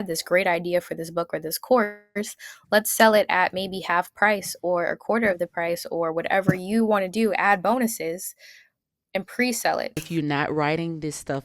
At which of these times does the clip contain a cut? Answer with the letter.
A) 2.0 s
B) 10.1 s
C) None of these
B